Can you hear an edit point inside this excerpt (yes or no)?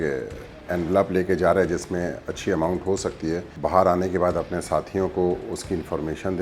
yes